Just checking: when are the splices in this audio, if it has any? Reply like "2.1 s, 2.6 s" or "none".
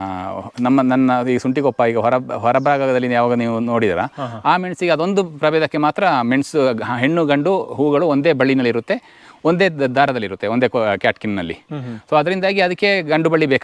none